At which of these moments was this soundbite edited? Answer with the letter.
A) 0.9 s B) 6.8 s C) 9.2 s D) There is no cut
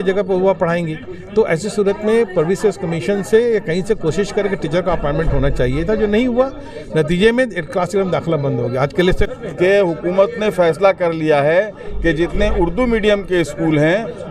C